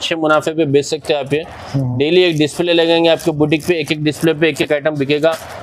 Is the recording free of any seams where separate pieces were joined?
yes; 0 cuts

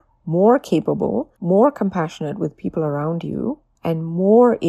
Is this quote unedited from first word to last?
no; 2 cuts; at 1.3 s, 3.7 s

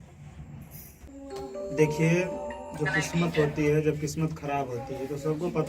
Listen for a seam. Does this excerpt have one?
yes; 1 cut; at 1.1 s

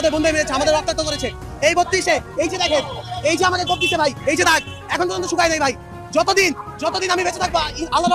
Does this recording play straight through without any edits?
yes; 0 cuts

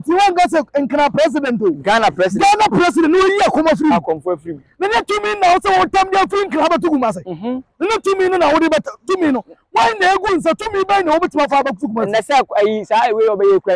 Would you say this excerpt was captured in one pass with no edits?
yes; 0 cuts

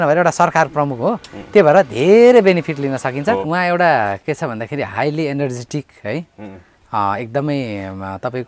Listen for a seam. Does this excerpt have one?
yes; 1 cut; at 3.4 s

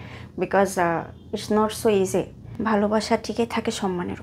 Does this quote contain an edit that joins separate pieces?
yes; 1 cut; at 2.4 s

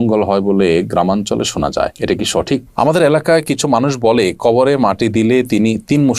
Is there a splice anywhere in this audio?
yes; 1 cut; at 2.7 s

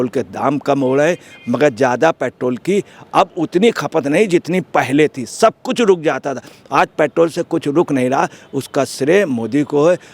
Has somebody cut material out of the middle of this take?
no; 0 cuts

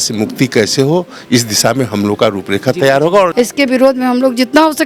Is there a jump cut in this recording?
yes; 1 cut; at 3.3 s

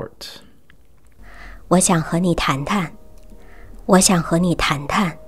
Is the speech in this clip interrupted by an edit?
no; 0 cuts

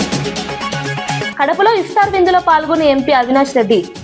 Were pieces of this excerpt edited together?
no; 0 cuts

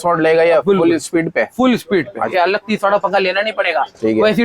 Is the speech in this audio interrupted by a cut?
yes; 1 cut; at 2.3 s

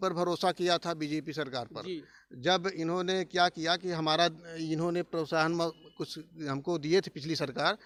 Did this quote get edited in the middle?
no; 0 cuts

